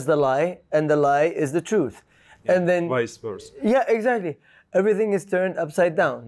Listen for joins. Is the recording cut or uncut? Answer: uncut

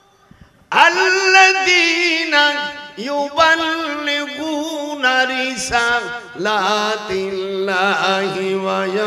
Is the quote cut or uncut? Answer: uncut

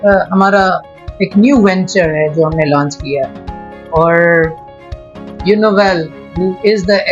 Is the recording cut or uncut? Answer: uncut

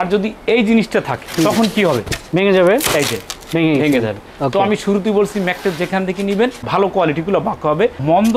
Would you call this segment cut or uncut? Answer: cut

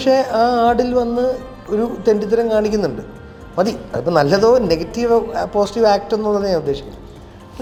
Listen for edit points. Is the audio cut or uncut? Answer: uncut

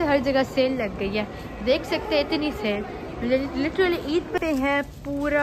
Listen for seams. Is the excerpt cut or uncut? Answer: cut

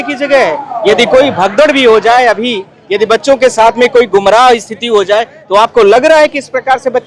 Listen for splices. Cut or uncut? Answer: uncut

